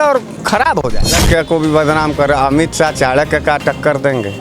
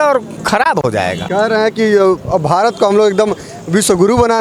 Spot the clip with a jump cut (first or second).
first